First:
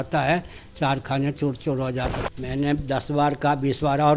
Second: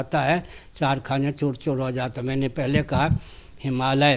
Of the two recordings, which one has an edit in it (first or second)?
first